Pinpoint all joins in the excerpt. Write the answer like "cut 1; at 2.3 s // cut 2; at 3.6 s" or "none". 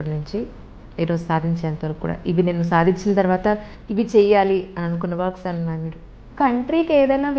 cut 1; at 6.3 s